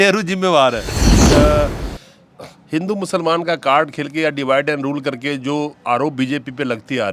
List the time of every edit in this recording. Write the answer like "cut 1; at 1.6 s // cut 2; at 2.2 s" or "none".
cut 1; at 1.2 s